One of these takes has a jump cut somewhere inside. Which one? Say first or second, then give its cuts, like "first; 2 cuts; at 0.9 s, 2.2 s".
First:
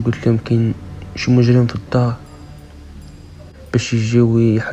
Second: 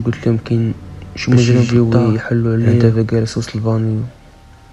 second; 2 cuts; at 1.7 s, 2.8 s